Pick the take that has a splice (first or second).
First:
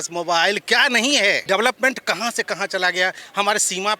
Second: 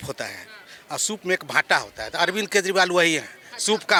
first